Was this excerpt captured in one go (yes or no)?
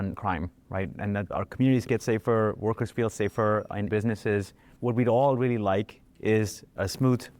yes